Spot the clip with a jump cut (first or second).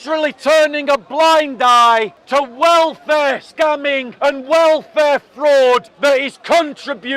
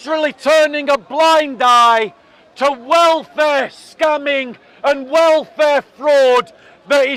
first